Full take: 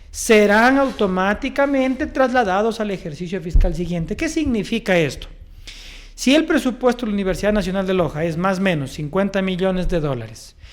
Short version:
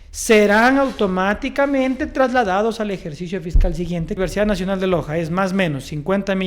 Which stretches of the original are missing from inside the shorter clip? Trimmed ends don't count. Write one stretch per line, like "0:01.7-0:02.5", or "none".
0:04.2-0:07.2